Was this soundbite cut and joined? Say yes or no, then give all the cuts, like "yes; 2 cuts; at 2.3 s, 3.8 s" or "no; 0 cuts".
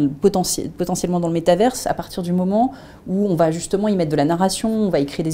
no; 0 cuts